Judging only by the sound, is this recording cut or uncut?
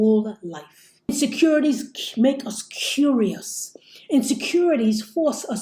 cut